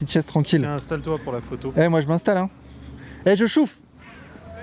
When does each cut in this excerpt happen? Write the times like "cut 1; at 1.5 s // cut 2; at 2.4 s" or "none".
none